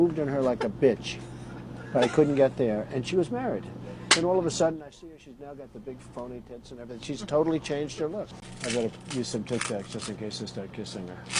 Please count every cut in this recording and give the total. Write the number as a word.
one